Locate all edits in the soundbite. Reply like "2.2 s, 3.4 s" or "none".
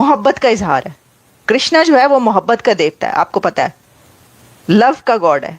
none